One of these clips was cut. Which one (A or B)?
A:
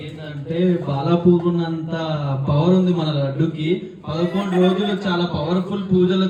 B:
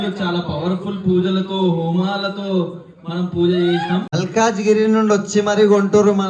B